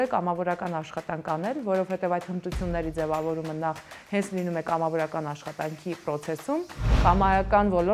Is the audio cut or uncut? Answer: cut